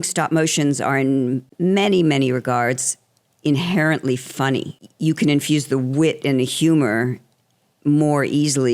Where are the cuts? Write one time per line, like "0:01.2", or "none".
0:01.5
0:04.8